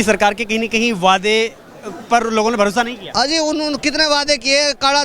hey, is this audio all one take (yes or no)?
yes